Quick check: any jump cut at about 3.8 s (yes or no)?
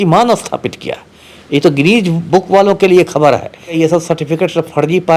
yes